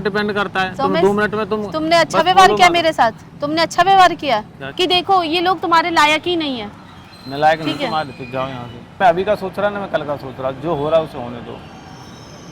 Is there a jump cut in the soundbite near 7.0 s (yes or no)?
no